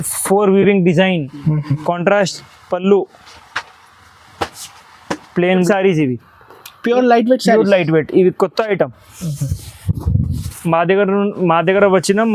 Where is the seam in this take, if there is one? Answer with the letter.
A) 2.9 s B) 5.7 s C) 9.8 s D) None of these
B